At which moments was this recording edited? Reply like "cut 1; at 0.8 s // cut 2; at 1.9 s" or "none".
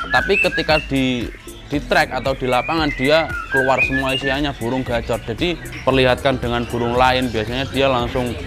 cut 1; at 5.7 s